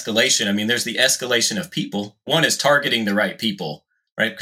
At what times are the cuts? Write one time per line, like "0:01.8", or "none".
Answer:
none